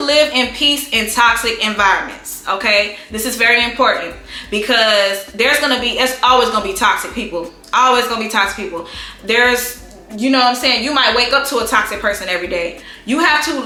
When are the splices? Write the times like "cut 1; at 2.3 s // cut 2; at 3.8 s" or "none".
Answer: none